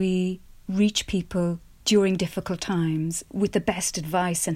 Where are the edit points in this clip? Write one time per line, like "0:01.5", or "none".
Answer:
0:03.2